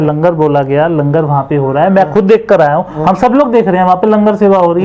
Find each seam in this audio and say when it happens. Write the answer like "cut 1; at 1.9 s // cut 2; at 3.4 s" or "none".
none